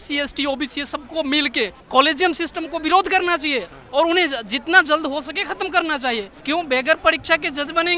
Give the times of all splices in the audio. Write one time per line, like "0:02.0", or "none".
0:01.8
0:06.3